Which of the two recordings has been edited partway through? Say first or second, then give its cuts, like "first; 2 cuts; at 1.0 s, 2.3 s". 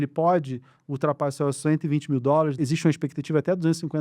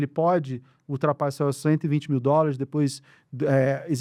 first; 1 cut; at 2.5 s